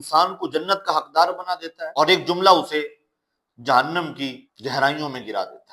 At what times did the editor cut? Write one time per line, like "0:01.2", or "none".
0:01.8
0:04.5